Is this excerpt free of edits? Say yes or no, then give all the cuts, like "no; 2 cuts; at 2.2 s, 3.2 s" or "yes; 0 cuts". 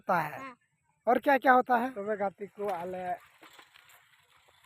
no; 1 cut; at 2.0 s